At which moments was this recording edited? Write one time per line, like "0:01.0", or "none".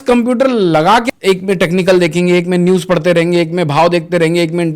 0:01.0